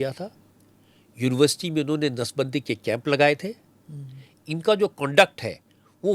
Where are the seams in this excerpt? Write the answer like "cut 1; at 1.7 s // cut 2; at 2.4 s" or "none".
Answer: none